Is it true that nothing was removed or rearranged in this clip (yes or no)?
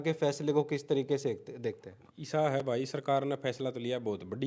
yes